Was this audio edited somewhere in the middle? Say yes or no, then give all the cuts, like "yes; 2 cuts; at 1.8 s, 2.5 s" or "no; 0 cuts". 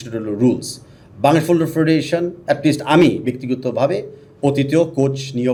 no; 0 cuts